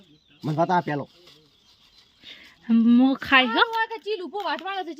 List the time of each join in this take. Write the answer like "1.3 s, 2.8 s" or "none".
3.7 s

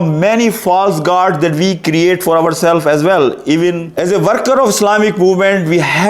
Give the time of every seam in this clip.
3.9 s

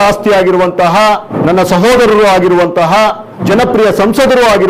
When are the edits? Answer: 1.3 s, 3.4 s

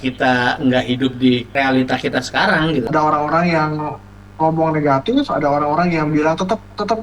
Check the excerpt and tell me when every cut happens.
1.5 s, 2.9 s

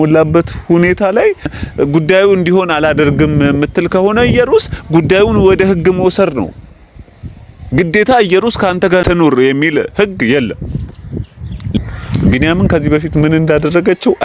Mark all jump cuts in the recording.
1.6 s, 9.0 s, 11.8 s

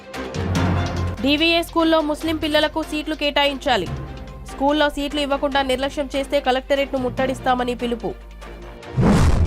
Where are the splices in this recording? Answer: none

